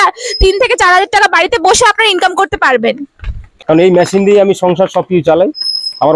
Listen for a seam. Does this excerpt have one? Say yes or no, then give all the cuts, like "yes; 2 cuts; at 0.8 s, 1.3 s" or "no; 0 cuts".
yes; 1 cut; at 3.5 s